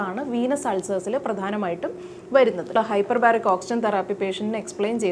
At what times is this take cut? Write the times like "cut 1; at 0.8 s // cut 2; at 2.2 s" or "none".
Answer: cut 1; at 2.7 s